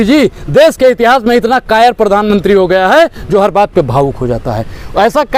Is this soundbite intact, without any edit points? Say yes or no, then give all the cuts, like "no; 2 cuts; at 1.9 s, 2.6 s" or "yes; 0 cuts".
yes; 0 cuts